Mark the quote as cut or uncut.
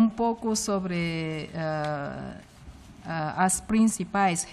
uncut